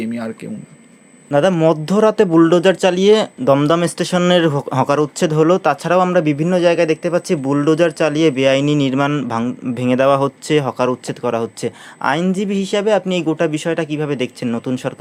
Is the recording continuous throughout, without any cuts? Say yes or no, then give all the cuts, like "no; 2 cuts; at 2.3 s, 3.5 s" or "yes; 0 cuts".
yes; 0 cuts